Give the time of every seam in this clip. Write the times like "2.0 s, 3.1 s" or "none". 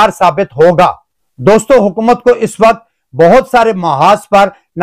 none